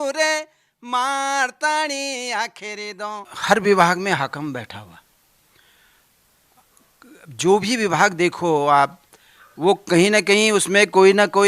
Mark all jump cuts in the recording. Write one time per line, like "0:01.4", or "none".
0:03.3

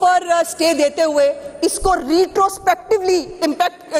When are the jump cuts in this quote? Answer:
none

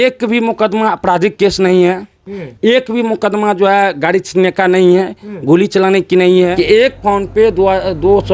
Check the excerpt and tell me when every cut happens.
0:06.5

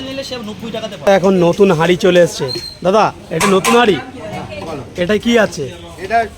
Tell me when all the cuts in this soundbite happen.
0:01.1

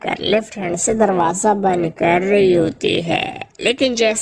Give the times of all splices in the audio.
none

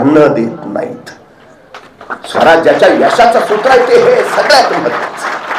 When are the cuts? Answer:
none

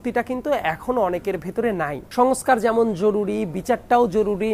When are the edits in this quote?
0:02.0

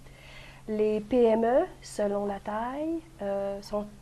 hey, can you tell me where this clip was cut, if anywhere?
none

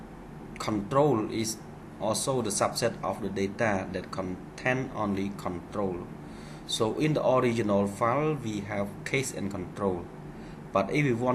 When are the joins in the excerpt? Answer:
none

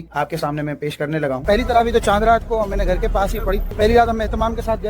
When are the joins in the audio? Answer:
0:01.4
0:03.7

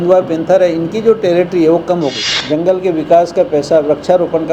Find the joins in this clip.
0:02.3

